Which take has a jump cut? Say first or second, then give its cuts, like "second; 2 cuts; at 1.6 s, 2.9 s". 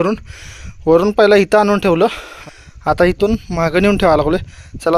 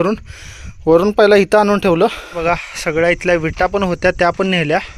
second; 1 cut; at 2.4 s